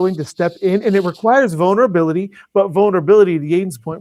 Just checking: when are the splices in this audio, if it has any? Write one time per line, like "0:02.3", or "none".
none